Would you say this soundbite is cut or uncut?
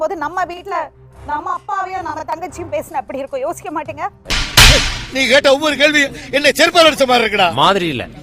uncut